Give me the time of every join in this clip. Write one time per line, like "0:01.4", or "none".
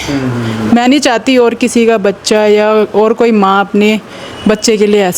none